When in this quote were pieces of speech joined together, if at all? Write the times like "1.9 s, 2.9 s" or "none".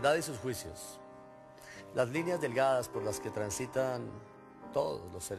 none